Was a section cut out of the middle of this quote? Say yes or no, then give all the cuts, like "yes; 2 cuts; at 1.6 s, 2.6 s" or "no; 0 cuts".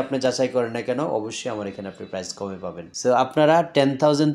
yes; 1 cut; at 2.9 s